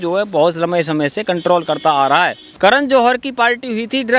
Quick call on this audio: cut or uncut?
cut